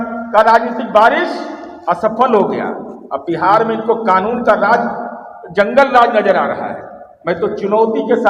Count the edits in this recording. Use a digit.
0